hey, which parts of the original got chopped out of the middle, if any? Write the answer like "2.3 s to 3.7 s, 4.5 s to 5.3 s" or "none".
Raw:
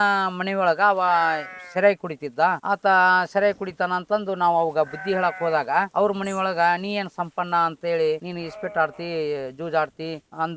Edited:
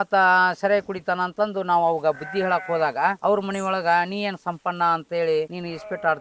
none